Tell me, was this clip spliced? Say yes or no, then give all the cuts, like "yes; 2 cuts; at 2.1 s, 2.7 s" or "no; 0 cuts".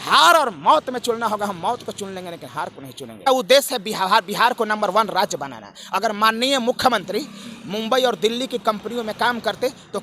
yes; 1 cut; at 3.3 s